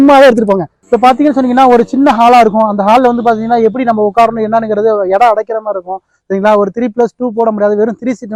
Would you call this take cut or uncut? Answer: uncut